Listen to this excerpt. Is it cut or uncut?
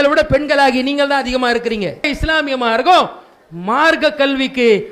cut